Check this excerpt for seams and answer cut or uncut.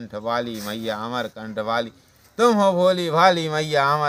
uncut